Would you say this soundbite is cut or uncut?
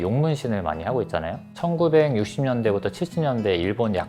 cut